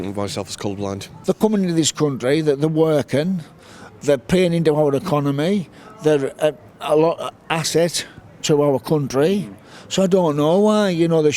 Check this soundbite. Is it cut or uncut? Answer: cut